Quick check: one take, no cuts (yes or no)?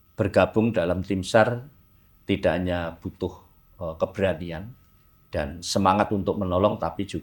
yes